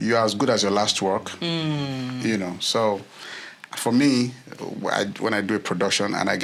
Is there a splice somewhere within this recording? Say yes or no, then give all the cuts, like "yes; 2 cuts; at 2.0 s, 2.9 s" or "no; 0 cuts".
no; 0 cuts